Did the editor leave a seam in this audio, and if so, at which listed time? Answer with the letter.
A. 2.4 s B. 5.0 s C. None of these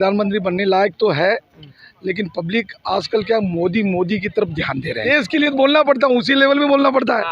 B